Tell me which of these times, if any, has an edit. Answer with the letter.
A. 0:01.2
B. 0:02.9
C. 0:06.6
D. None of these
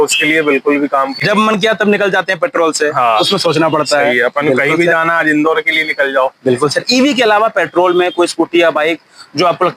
D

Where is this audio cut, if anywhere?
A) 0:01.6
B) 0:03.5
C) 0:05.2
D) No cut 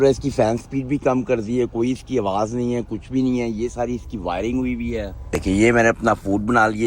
C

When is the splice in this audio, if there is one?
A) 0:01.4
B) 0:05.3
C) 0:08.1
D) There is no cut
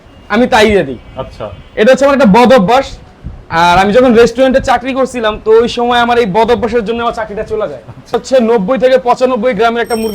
C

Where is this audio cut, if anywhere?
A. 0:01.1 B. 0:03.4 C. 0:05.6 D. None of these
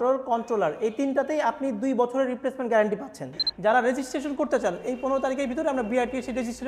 B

